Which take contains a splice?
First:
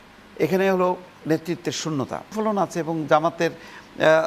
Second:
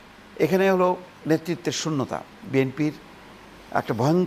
first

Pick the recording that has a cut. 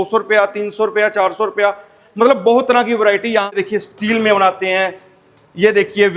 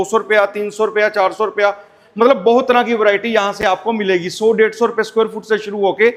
first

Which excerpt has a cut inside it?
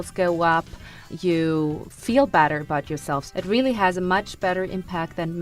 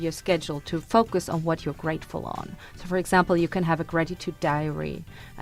first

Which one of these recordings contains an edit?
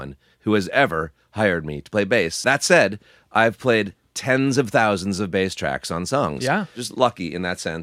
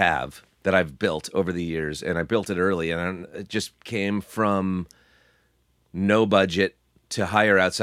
first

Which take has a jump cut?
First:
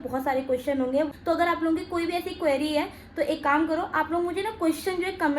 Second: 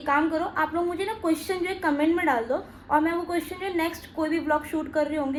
first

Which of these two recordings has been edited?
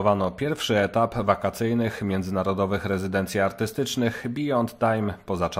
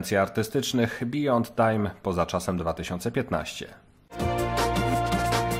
second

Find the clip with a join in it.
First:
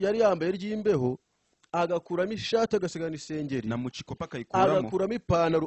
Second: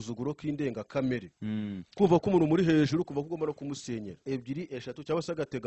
second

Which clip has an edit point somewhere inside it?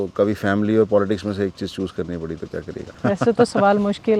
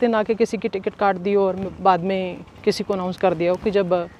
first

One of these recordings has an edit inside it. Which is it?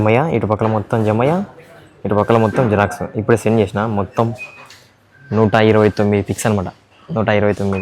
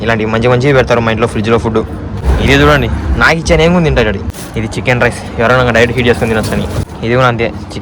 second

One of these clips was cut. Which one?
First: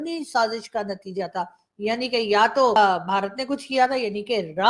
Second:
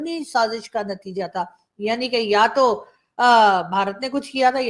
first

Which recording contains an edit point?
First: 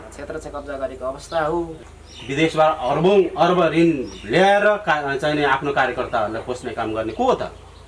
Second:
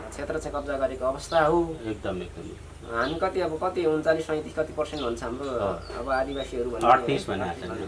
first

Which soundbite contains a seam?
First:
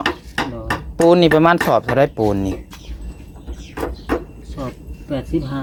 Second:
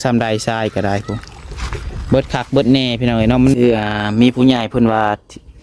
second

